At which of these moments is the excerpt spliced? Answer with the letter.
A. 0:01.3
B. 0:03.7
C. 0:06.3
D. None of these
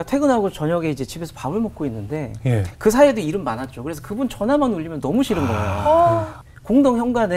C